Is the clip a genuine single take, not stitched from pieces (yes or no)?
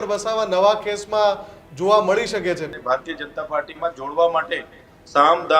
no